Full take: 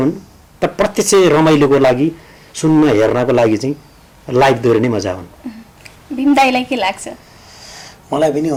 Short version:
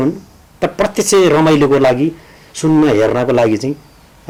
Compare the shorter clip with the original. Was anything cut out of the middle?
no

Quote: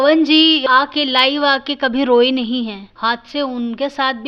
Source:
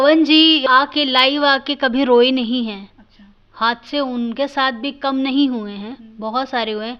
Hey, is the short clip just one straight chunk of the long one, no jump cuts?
no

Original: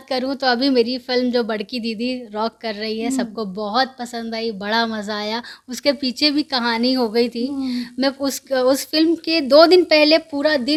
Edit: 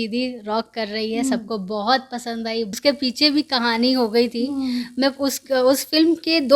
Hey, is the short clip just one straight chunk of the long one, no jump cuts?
no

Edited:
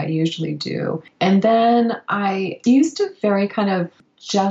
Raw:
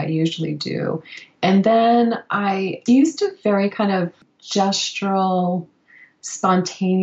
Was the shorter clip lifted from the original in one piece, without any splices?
no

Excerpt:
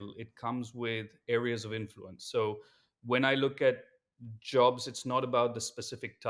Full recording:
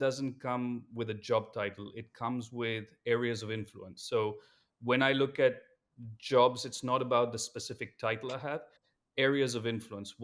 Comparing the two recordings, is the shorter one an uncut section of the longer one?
yes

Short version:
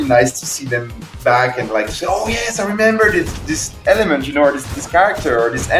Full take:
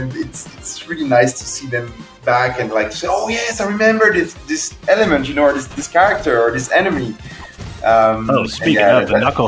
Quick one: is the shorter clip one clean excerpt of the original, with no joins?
yes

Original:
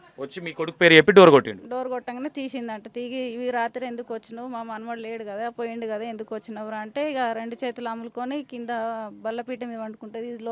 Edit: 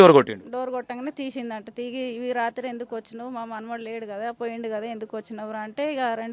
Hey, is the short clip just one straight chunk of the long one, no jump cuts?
yes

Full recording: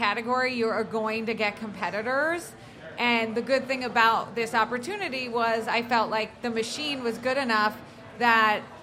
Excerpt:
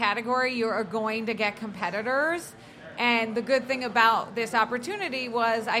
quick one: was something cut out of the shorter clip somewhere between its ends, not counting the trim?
no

